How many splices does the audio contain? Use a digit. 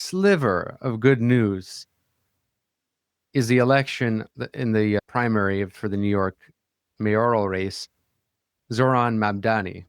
2